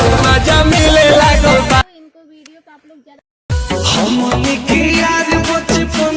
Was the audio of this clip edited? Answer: yes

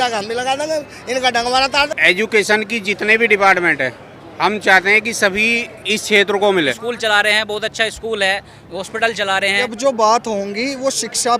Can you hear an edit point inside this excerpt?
yes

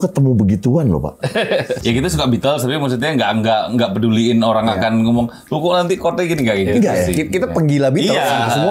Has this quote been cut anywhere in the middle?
yes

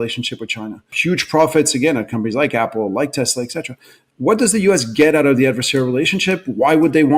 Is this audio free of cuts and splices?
no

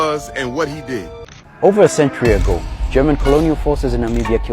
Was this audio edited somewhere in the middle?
yes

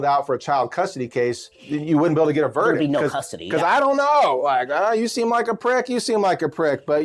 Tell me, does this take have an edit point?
yes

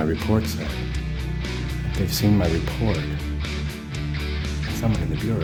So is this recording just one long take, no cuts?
yes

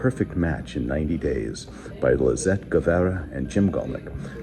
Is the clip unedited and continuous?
no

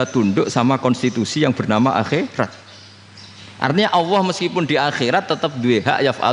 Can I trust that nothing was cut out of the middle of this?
yes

